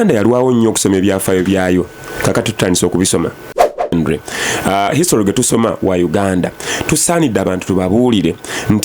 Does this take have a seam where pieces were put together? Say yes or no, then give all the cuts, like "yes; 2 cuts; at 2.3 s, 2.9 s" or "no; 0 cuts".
yes; 1 cut; at 3.9 s